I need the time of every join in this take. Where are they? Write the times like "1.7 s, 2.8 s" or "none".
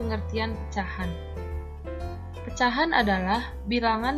1.1 s, 2.5 s